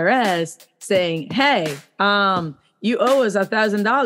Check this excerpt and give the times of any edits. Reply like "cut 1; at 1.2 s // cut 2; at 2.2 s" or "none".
none